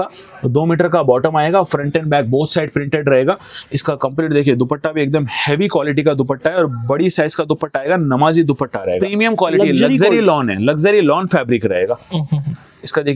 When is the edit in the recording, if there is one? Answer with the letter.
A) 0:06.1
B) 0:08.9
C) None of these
B